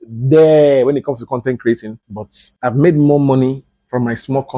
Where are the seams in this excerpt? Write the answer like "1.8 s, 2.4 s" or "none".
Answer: 2.0 s